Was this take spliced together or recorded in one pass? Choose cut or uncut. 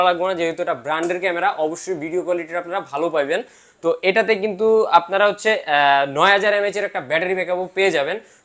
uncut